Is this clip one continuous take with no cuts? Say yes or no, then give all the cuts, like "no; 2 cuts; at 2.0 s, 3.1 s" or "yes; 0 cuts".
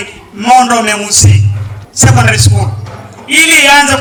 yes; 0 cuts